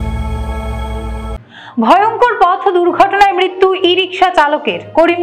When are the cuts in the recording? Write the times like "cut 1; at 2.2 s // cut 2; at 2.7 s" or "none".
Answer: cut 1; at 1.4 s

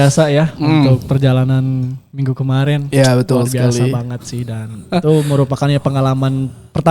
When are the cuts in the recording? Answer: none

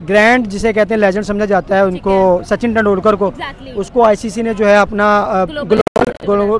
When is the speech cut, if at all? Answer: none

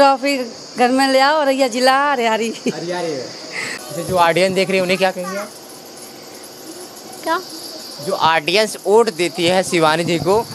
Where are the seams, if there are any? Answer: cut 1; at 3.8 s

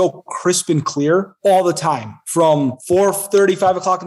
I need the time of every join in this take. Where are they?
cut 1; at 1.3 s // cut 2; at 2.8 s

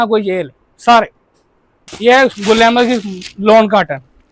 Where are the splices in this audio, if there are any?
cut 1; at 1.8 s

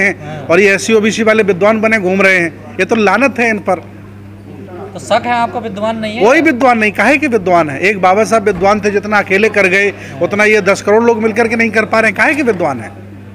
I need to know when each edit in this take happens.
none

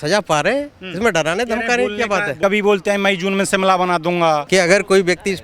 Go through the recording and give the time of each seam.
cut 1; at 2.3 s // cut 2; at 4.4 s

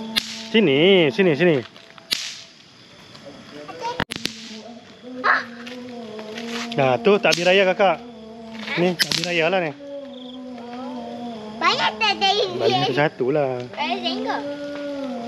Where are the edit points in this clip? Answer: cut 1; at 4.1 s

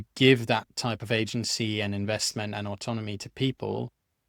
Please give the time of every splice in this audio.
none

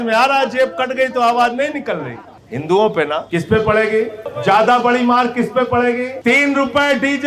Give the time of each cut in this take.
cut 1; at 3.2 s // cut 2; at 4.2 s // cut 3; at 6.1 s

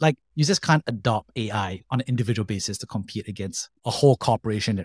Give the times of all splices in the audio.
none

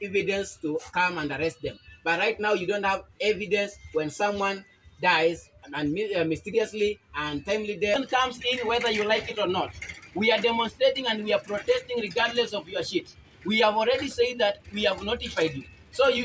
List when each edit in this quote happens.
cut 1; at 7.9 s

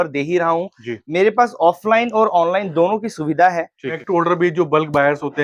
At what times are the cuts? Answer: cut 1; at 4.0 s

